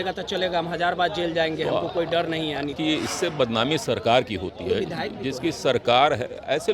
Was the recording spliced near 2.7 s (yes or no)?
yes